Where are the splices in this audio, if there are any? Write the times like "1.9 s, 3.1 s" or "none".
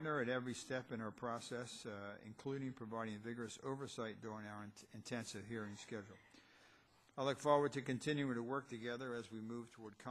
none

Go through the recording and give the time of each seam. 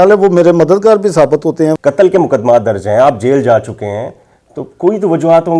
1.8 s

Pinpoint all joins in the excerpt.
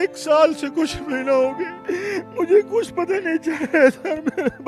1.7 s

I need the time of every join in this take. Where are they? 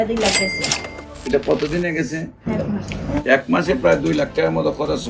2.5 s

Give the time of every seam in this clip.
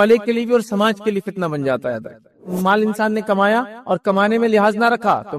2.4 s

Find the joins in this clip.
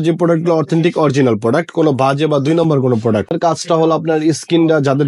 3.3 s

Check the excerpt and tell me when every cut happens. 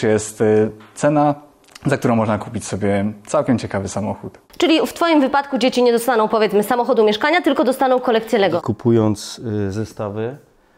4.3 s, 8.6 s

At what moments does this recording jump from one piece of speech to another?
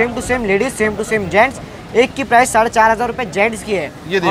none

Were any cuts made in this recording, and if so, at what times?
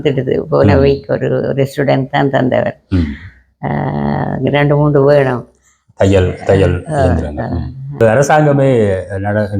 8.0 s

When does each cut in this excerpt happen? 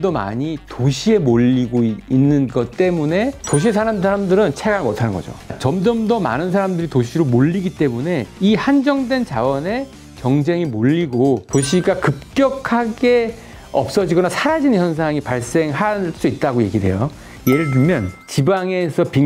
5.5 s, 11.5 s

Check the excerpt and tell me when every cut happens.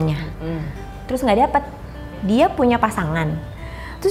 2.1 s

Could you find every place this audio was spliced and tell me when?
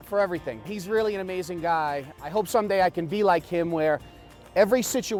none

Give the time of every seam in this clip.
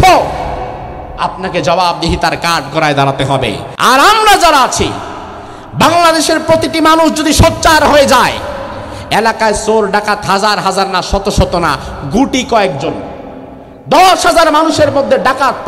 3.7 s

